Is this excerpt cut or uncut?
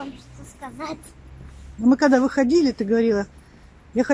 uncut